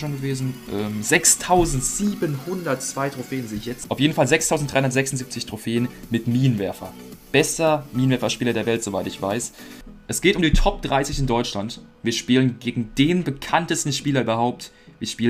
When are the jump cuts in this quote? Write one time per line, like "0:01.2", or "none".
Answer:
0:03.7
0:09.8